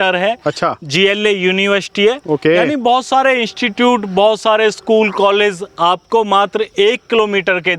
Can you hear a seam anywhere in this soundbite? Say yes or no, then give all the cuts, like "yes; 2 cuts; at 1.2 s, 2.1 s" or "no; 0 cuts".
no; 0 cuts